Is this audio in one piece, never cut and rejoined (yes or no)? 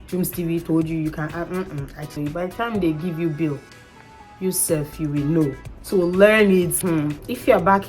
no